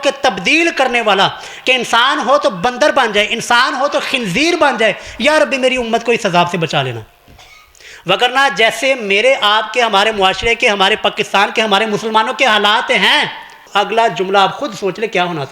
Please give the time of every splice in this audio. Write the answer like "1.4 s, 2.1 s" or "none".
13.6 s